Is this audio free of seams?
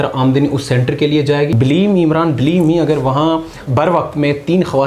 no; 2 cuts; at 1.5 s, 3.6 s

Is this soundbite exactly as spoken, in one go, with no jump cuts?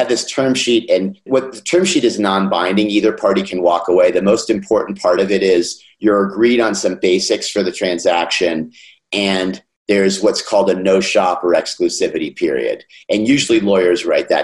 no; 1 cut; at 1.2 s

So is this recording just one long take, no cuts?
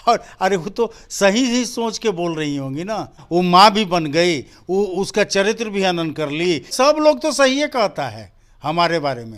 no; 2 cuts; at 3.2 s, 6.7 s

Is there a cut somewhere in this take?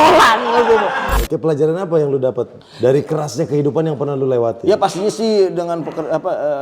yes; 2 cuts; at 1.1 s, 2.6 s

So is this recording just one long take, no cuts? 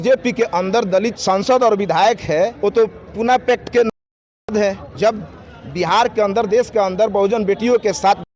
no; 3 cuts; at 1.2 s, 2.5 s, 4.9 s

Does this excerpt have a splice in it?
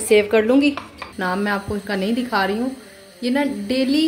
yes; 1 cut; at 1.1 s

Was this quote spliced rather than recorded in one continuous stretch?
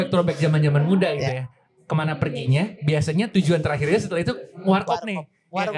no; 0 cuts

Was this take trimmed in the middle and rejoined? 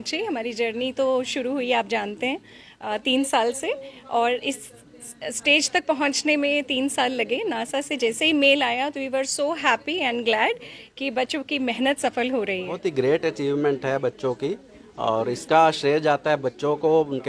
yes; 1 cut; at 12.7 s

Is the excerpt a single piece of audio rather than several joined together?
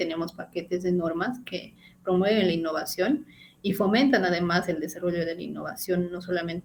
yes; 0 cuts

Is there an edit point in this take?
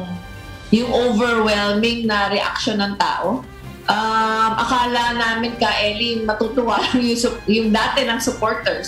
no; 0 cuts

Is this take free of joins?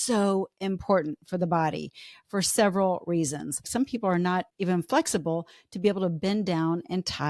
no; 2 cuts; at 3.7 s, 4.5 s

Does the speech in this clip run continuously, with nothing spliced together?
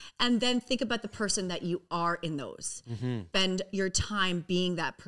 no; 1 cut; at 3.2 s

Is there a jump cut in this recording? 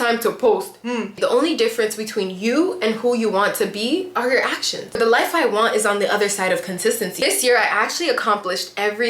yes; 3 cuts; at 1.0 s, 5.0 s, 7.1 s

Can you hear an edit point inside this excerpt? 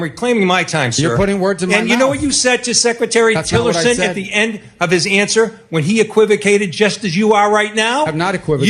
no; 0 cuts

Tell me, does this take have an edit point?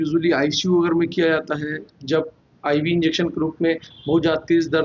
no; 0 cuts

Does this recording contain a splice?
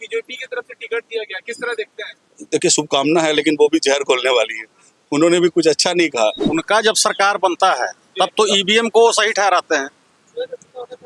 yes; 1 cut; at 6.5 s

